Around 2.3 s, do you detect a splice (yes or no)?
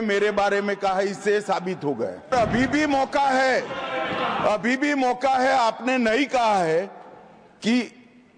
yes